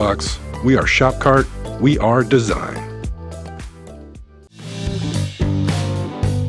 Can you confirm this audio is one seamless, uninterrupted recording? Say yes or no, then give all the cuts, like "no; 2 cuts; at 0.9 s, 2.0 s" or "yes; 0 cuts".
no; 1 cut; at 4.6 s